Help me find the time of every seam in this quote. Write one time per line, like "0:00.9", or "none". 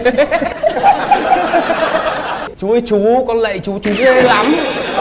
0:02.5